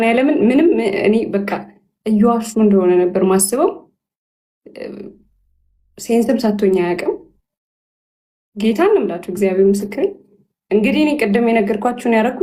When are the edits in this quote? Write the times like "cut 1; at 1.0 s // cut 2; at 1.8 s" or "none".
none